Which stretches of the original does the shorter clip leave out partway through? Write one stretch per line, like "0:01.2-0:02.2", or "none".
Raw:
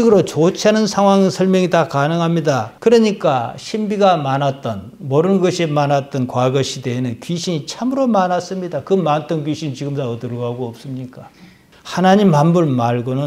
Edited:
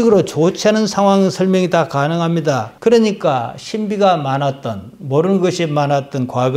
none